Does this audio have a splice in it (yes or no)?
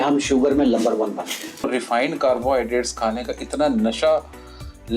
yes